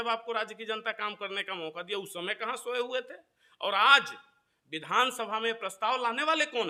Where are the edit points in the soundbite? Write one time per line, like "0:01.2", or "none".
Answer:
none